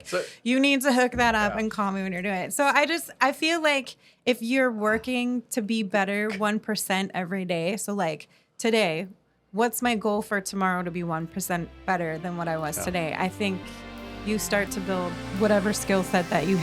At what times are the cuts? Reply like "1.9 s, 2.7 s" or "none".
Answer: 15.2 s